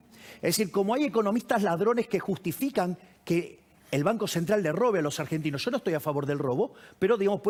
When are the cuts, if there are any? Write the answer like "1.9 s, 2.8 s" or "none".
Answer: none